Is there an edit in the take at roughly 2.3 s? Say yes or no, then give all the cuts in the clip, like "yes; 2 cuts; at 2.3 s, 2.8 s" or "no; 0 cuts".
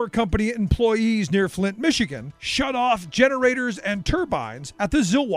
no; 0 cuts